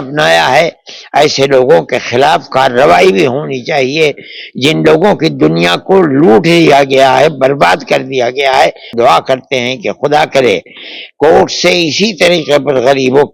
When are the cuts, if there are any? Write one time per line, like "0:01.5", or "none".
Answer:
0:08.9